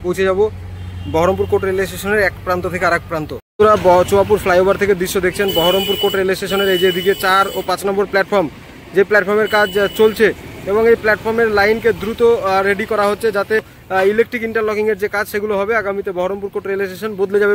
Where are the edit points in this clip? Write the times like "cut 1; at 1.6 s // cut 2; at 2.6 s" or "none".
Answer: cut 1; at 3.4 s // cut 2; at 13.8 s